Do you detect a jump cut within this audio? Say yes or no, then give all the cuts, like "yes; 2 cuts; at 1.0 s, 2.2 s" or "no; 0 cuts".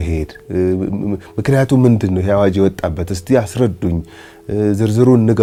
no; 0 cuts